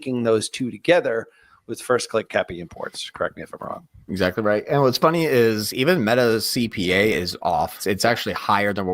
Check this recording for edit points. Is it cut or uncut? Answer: cut